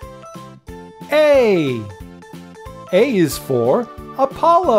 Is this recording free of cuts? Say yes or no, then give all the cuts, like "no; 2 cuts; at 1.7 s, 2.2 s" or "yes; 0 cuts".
yes; 0 cuts